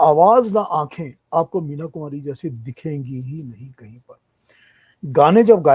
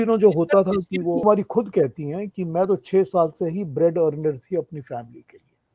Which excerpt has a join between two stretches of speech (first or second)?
second